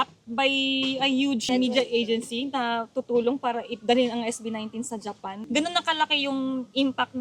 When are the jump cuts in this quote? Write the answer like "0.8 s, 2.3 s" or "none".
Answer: 1.4 s, 5.3 s